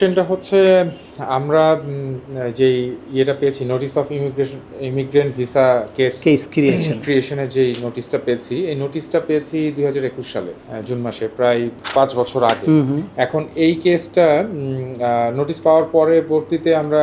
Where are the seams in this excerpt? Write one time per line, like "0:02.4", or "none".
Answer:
none